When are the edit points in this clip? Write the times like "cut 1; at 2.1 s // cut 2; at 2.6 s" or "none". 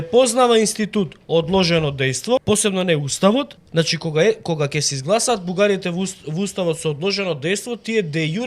cut 1; at 2.4 s // cut 2; at 3.6 s

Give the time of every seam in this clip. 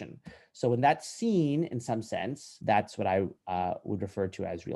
cut 1; at 2.5 s

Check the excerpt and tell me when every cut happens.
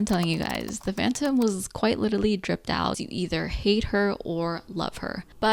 cut 1; at 3.0 s

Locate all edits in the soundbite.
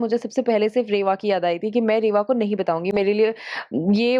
none

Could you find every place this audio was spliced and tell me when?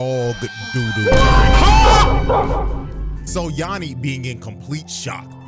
none

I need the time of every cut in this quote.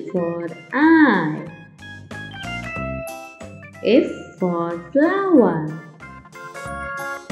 none

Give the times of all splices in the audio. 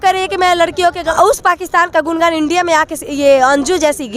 cut 1; at 1.0 s

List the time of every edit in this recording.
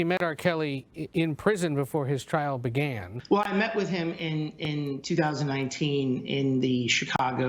cut 1; at 3.1 s

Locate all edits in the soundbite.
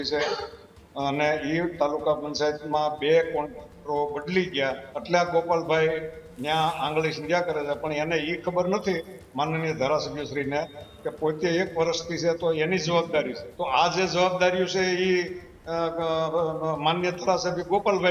cut 1; at 4.9 s // cut 2; at 13.4 s

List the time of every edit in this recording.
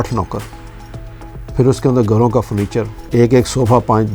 cut 1; at 3.0 s

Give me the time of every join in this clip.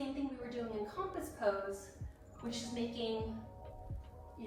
none

